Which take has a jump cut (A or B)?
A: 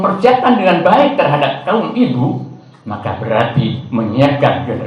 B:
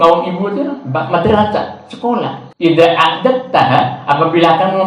B